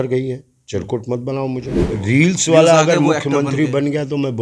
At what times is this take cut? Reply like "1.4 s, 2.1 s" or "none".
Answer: 1.8 s